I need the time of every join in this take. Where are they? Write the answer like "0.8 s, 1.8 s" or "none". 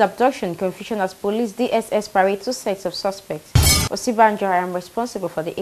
none

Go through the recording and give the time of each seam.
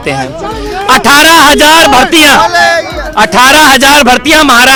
none

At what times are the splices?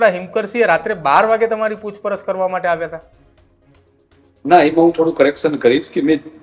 none

